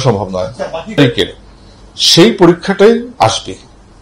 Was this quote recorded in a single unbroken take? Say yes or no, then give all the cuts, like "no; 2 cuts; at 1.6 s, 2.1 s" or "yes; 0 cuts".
no; 1 cut; at 1.0 s